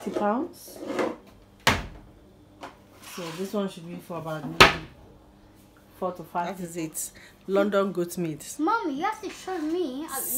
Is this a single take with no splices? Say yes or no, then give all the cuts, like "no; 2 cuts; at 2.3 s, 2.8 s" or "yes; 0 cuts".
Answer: no; 1 cut; at 6.6 s